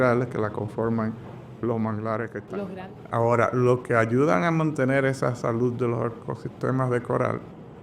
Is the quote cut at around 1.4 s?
no; 1 cut; at 2.7 s

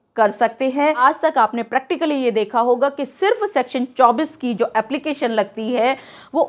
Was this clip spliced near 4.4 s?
no; 1 cut; at 1.0 s

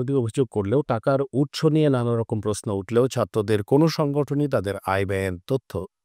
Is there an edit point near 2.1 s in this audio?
no; 0 cuts

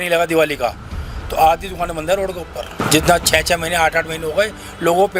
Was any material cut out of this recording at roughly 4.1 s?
no; 1 cut; at 2.8 s

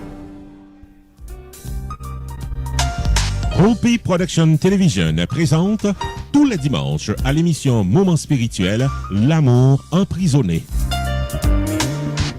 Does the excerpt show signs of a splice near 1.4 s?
yes; 1 cut; at 1.4 s

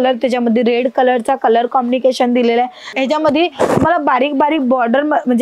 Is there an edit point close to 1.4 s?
no; 1 cut; at 2.9 s

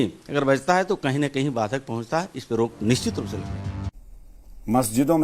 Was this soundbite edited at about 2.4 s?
no; 1 cut; at 3.9 s

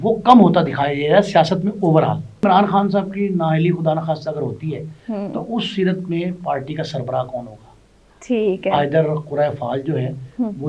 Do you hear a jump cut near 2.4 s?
yes; 1 cut; at 2.4 s

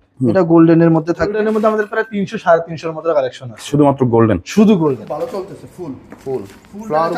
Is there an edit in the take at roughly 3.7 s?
no; 2 cuts; at 1.4 s, 5.0 s

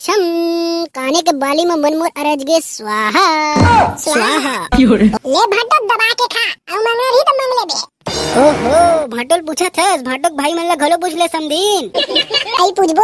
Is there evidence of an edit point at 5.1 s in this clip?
yes; 1 cut; at 5.1 s

